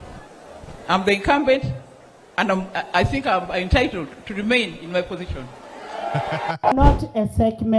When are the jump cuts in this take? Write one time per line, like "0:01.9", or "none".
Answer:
0:06.7